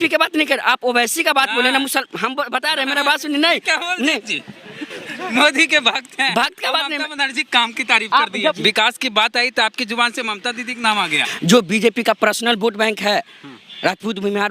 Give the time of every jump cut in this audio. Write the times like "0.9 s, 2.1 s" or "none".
8.5 s, 11.2 s